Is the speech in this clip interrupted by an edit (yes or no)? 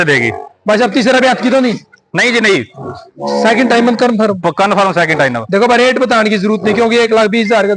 no